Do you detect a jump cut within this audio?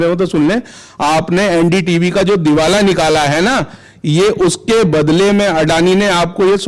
no; 0 cuts

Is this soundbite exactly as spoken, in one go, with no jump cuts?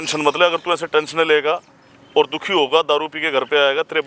yes; 0 cuts

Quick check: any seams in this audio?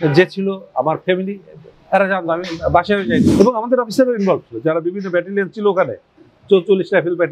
yes; 1 cut; at 3.2 s

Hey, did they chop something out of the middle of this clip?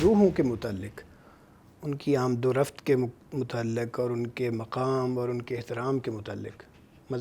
no; 0 cuts

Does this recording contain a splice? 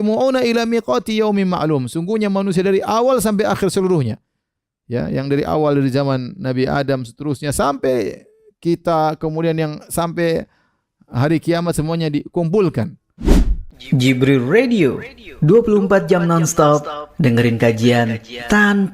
yes; 1 cut; at 13.0 s

